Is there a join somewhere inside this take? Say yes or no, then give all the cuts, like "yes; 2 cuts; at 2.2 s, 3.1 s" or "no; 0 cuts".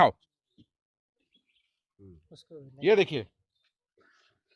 no; 0 cuts